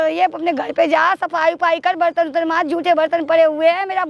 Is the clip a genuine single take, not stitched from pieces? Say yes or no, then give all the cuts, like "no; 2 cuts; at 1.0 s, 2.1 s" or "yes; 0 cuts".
yes; 0 cuts